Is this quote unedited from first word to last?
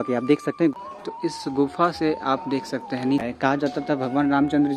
no; 2 cuts; at 0.7 s, 3.2 s

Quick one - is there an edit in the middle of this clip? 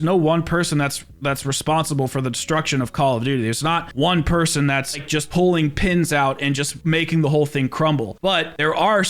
no; 0 cuts

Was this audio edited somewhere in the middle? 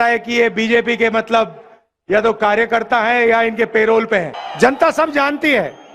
yes; 1 cut; at 4.4 s

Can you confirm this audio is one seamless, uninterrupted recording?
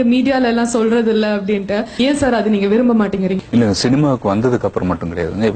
no; 2 cuts; at 2.0 s, 3.4 s

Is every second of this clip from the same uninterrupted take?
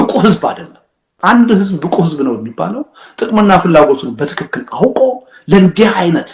no; 1 cut; at 1.1 s

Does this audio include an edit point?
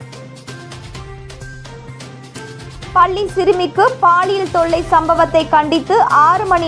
yes; 1 cut; at 2.6 s

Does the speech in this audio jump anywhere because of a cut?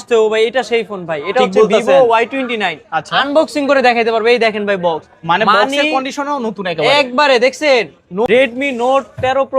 yes; 1 cut; at 8.3 s

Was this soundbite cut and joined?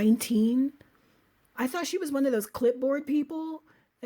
yes; 1 cut; at 1.5 s

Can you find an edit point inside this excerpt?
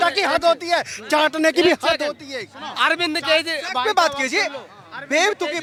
no; 0 cuts

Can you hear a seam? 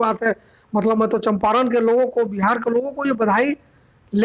no; 0 cuts

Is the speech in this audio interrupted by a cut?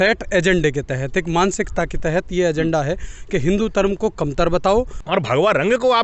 yes; 1 cut; at 5.0 s

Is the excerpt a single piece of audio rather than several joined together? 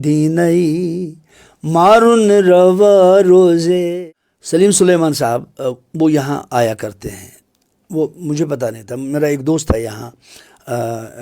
no; 1 cut; at 4.0 s

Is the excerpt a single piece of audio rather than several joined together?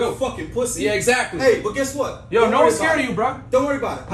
yes; 0 cuts

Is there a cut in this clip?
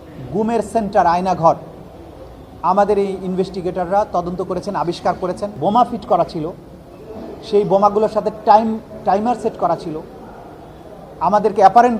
yes; 1 cut; at 5.6 s

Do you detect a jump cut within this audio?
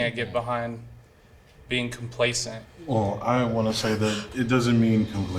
no; 0 cuts

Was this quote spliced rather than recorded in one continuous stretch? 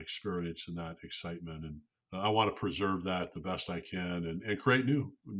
yes; 1 cut; at 1.9 s

